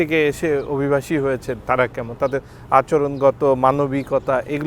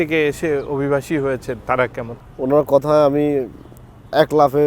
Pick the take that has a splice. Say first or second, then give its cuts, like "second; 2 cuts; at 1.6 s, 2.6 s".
second; 1 cut; at 2.1 s